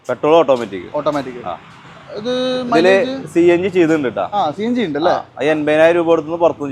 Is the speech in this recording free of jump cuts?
yes; 0 cuts

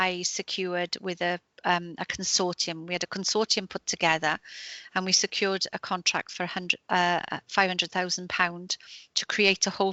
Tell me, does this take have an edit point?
no; 0 cuts

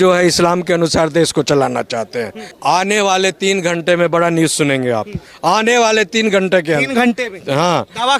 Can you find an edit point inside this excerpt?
yes; 1 cut; at 2.5 s

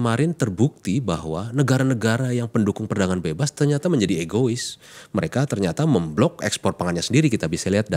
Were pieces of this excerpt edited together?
no; 0 cuts

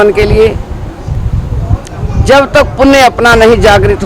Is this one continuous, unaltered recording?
no; 1 cut; at 1.2 s

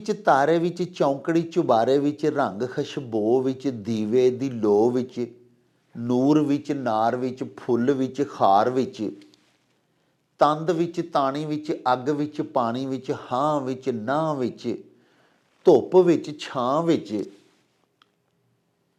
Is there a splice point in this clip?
no; 0 cuts

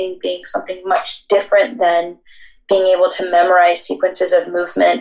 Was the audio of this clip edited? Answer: no; 0 cuts

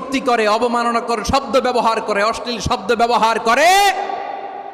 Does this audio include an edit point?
no; 0 cuts

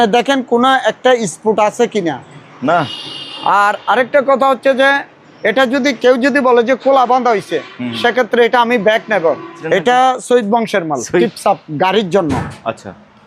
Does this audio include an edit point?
yes; 2 cuts; at 9.6 s, 11.2 s

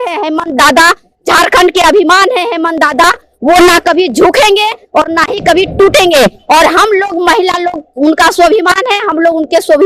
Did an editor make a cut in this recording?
no; 0 cuts

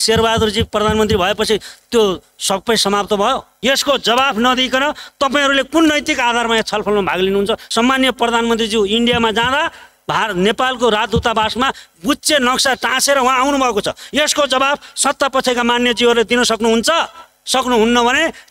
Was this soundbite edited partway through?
yes; 2 cuts; at 3.5 s, 7.6 s

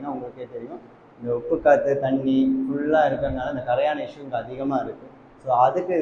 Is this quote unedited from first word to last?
yes; 0 cuts

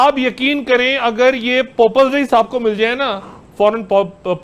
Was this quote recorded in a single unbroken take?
yes; 0 cuts

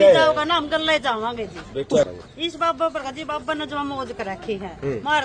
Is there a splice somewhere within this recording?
yes; 1 cut; at 2.1 s

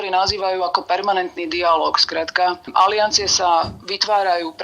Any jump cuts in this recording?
no; 0 cuts

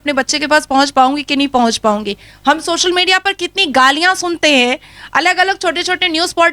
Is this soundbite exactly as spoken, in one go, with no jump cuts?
yes; 0 cuts

